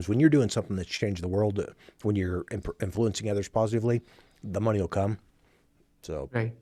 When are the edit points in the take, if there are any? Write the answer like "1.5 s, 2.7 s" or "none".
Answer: none